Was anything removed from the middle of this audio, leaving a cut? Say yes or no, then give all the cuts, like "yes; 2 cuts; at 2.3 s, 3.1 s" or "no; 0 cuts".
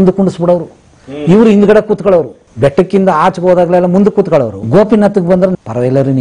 no; 0 cuts